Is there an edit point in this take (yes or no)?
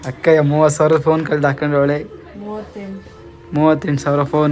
no